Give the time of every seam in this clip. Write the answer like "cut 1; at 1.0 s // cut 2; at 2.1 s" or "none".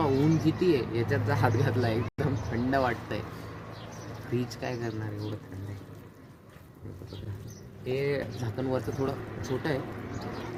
none